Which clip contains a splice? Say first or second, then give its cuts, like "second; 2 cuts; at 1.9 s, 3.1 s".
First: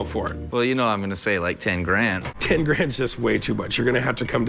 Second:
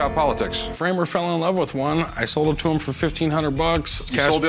first; 1 cut; at 2.2 s